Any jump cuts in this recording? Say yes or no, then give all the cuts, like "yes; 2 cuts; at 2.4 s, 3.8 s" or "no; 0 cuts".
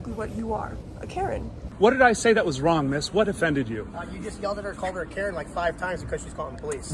yes; 1 cut; at 1.6 s